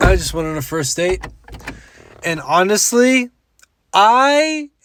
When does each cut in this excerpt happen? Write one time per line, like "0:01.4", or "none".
none